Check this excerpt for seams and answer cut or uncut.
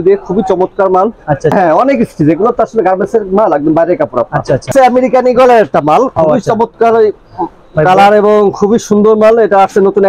cut